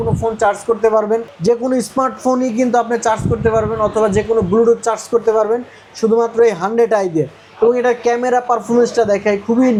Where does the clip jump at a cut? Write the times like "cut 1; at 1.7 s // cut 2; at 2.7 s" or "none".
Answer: none